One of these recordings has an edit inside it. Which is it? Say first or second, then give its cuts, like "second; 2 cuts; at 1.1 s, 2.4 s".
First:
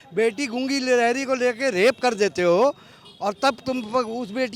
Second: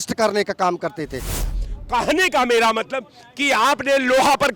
second; 1 cut; at 1.5 s